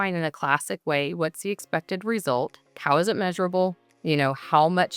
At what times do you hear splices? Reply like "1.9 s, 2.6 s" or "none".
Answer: 2.7 s, 3.9 s